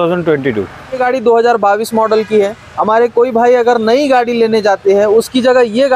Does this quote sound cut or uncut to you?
cut